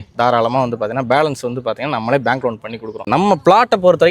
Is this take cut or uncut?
cut